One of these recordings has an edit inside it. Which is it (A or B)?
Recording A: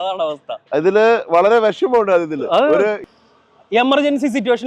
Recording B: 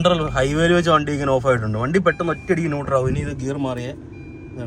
A